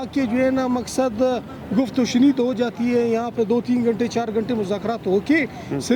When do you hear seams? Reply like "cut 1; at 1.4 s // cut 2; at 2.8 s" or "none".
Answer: none

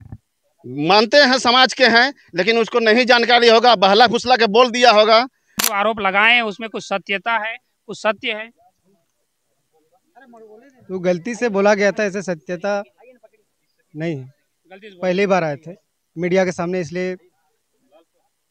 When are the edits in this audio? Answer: cut 1; at 5.7 s

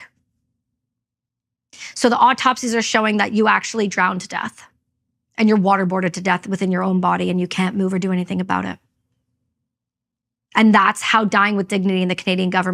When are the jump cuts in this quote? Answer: none

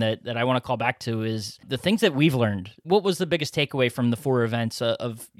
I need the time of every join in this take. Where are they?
cut 1; at 1.6 s // cut 2; at 2.8 s

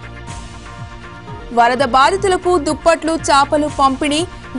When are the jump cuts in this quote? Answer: cut 1; at 0.9 s

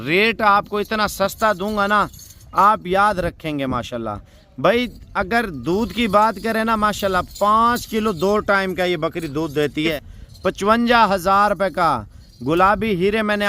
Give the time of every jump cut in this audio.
cut 1; at 9.9 s

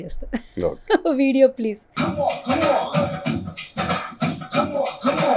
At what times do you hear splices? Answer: none

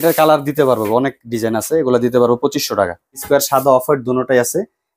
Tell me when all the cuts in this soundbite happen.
cut 1; at 3.2 s

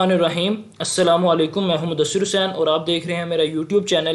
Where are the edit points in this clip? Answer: none

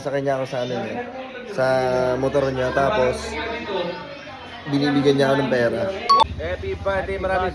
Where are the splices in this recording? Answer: cut 1; at 6.2 s

